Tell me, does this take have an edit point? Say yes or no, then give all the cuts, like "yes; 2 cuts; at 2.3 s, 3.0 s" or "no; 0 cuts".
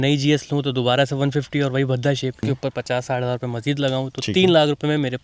yes; 1 cut; at 2.4 s